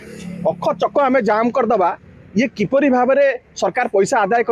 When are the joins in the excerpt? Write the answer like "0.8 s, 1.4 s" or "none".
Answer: none